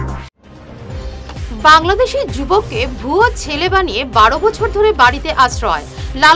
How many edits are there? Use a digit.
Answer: 0